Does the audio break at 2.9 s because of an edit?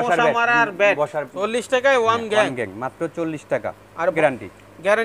no; 2 cuts; at 1.3 s, 4.2 s

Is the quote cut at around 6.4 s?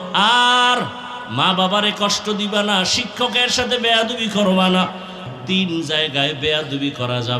no; 1 cut; at 5.2 s

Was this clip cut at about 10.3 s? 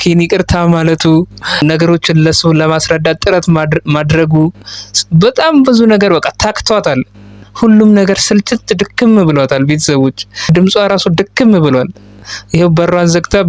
no; 0 cuts

